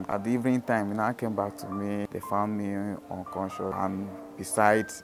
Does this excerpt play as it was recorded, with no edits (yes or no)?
no